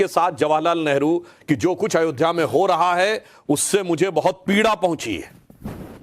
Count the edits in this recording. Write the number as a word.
one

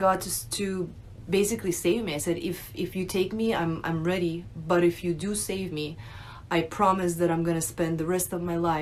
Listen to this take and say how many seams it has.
zero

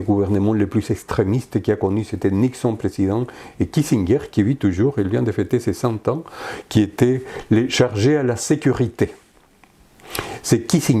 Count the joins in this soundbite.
zero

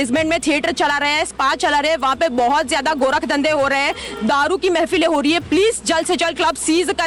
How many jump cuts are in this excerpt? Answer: zero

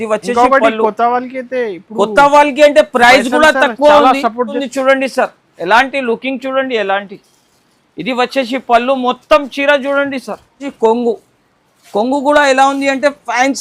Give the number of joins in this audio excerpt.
two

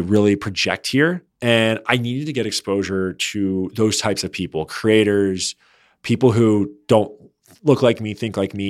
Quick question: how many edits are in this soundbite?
one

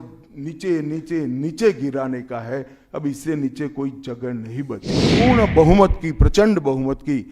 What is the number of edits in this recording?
one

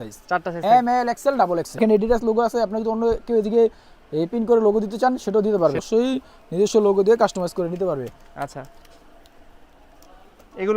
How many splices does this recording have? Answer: two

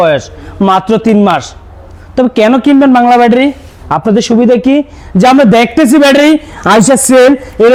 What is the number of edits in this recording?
zero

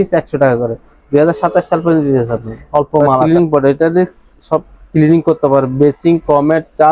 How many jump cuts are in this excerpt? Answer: one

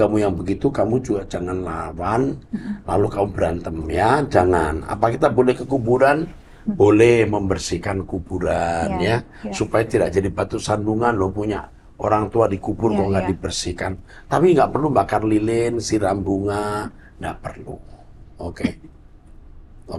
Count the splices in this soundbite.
zero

